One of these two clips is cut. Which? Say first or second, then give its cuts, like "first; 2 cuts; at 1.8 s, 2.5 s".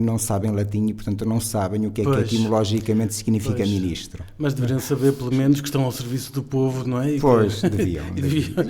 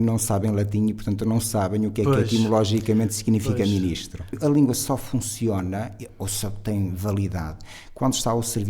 second; 1 cut; at 4.2 s